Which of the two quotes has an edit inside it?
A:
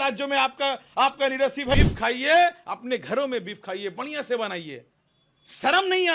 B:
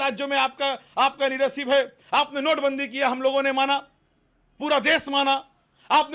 A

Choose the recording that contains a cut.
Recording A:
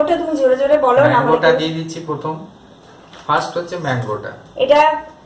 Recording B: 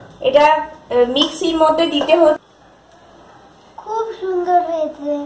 B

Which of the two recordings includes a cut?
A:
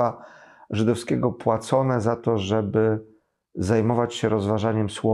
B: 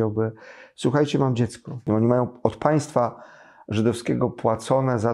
B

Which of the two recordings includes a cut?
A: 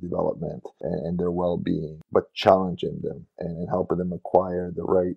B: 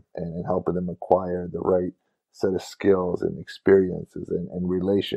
A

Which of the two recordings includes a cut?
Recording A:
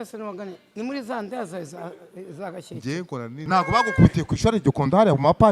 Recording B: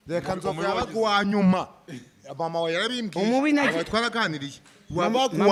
A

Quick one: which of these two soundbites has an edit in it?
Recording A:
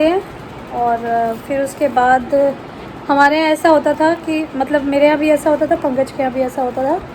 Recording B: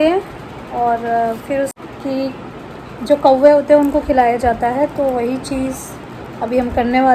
B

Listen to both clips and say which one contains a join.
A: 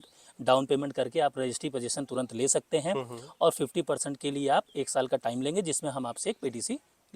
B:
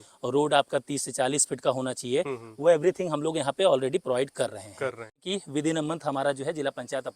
B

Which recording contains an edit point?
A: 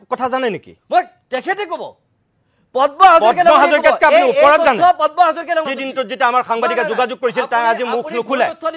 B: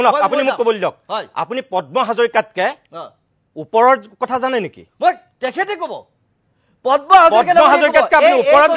A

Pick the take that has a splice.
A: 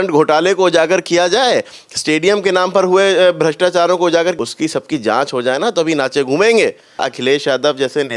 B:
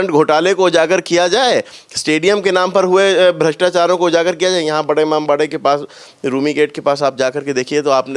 A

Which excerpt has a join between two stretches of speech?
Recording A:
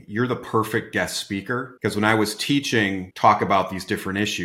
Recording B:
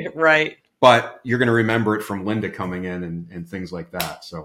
A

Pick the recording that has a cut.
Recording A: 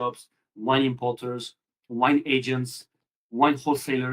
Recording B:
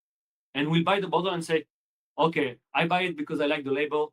A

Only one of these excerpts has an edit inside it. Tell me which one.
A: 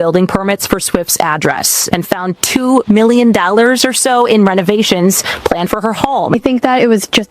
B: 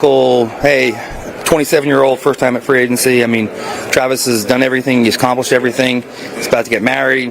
A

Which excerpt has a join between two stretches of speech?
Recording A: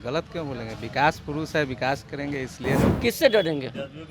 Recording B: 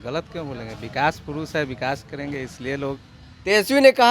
A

